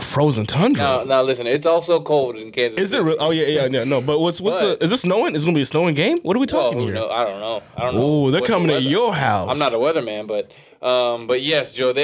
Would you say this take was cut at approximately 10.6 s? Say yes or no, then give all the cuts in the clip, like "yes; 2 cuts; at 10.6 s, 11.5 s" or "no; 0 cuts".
no; 0 cuts